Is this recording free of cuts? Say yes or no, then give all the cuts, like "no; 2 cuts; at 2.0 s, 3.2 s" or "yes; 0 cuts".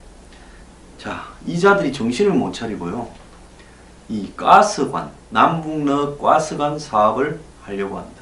yes; 0 cuts